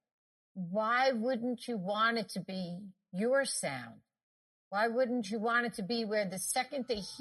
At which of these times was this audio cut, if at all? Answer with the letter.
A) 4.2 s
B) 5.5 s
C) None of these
C